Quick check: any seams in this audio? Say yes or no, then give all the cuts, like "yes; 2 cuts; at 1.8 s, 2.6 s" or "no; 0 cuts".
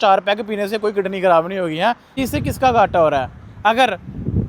yes; 1 cut; at 2.1 s